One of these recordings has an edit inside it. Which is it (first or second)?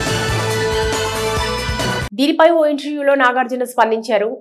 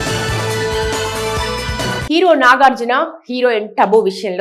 second